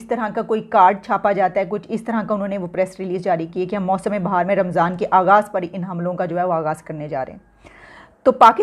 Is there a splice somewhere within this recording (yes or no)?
no